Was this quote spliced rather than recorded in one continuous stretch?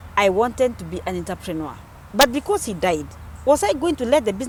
no; 0 cuts

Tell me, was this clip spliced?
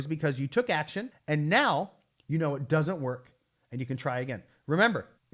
no; 0 cuts

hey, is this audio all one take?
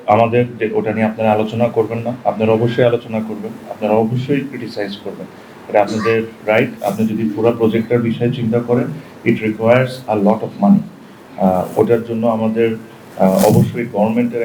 no; 1 cut; at 6.8 s

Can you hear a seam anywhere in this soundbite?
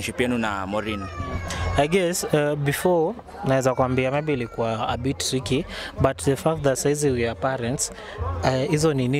no; 0 cuts

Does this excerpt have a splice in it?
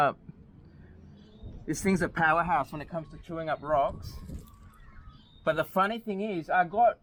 no; 0 cuts

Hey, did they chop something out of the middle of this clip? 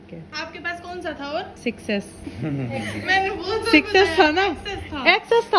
no; 0 cuts

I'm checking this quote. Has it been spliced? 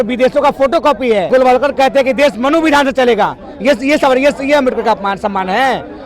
yes; 1 cut; at 1.3 s

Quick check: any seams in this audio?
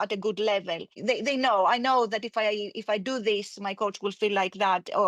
yes; 1 cut; at 0.9 s

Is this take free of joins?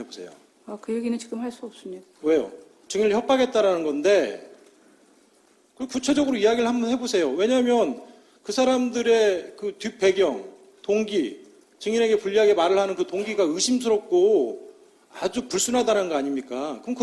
yes; 0 cuts

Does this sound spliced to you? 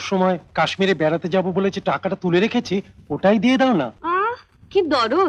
no; 0 cuts

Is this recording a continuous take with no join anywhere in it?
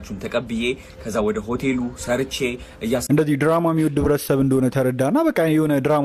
no; 1 cut; at 3.0 s

